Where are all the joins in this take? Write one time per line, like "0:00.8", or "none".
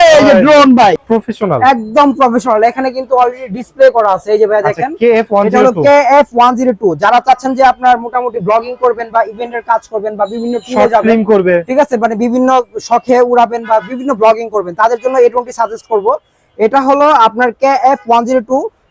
0:01.0

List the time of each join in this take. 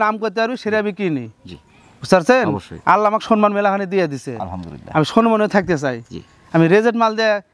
none

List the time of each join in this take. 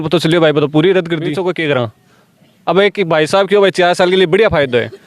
0:01.3

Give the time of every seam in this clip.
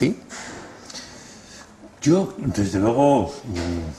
0:03.0

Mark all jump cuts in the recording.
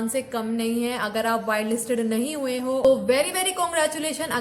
0:02.9

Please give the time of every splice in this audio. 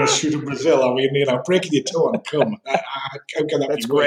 none

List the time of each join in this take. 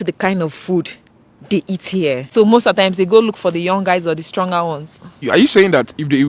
0:02.3
0:05.3

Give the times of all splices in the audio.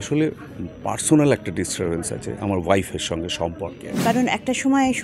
0:03.8

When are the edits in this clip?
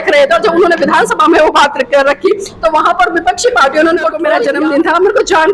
0:04.3

